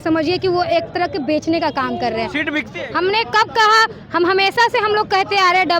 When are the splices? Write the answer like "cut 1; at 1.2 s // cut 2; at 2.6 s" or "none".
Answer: cut 1; at 2.7 s